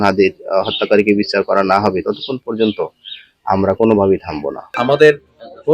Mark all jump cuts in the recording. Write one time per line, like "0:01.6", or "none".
0:04.7